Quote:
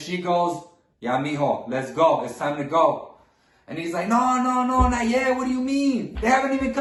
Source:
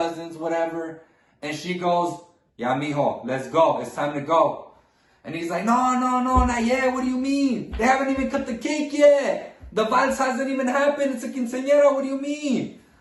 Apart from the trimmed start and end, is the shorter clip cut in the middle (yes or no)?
no